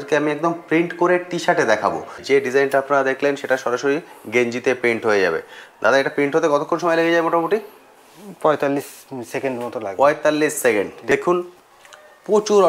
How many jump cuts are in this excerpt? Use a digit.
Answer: 2